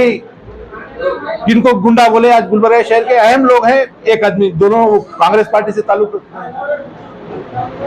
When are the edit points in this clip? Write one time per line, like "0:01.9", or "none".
none

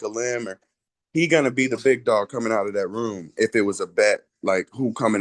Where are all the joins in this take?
none

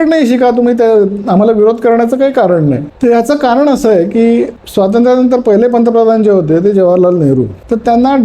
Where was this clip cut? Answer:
0:02.9

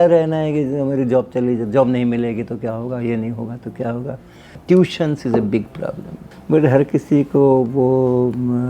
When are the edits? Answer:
0:06.3

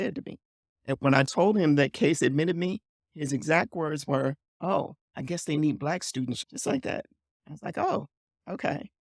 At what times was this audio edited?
0:04.5
0:05.0
0:06.4

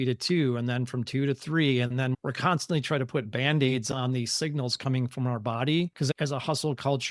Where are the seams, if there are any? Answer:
0:05.9

